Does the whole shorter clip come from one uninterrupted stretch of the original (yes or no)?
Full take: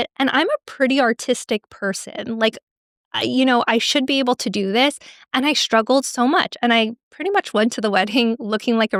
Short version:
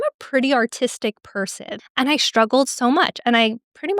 no